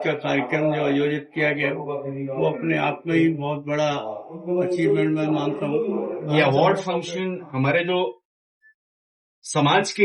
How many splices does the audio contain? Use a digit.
1